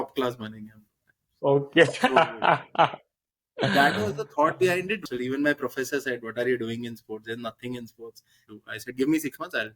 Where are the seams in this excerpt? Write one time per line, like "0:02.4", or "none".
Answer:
0:05.0
0:08.4